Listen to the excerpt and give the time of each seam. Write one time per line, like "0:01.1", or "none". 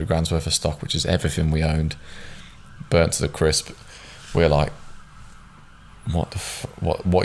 none